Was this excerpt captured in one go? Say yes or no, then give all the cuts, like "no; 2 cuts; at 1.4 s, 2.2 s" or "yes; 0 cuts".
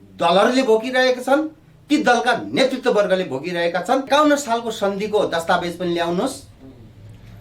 no; 1 cut; at 4.1 s